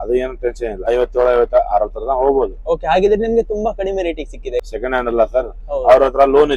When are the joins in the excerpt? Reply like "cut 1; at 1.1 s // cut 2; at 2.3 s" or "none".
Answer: cut 1; at 0.9 s // cut 2; at 4.6 s